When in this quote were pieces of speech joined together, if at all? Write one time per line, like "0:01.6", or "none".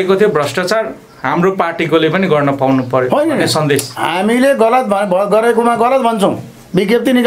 none